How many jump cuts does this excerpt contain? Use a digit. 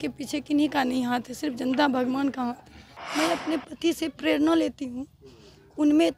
1